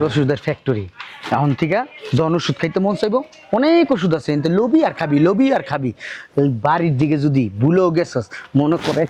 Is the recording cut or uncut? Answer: uncut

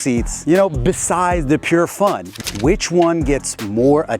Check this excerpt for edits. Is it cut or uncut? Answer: cut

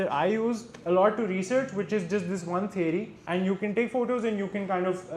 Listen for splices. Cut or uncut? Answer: cut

